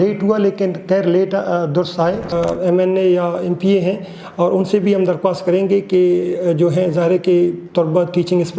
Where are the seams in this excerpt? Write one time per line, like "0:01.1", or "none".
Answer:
0:02.3